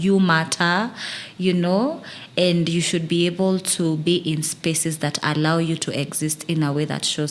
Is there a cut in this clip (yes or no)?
no